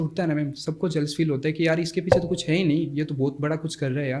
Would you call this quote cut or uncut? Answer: uncut